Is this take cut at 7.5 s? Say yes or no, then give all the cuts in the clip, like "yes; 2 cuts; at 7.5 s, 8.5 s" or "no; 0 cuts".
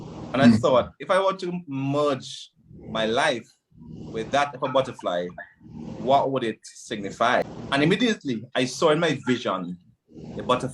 yes; 1 cut; at 7.5 s